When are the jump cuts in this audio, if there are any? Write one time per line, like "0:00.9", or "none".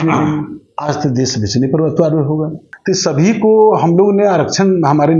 0:02.7